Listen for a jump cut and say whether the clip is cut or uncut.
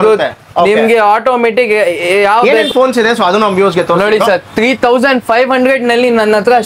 cut